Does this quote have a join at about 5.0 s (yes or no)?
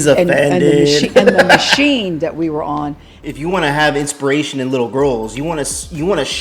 no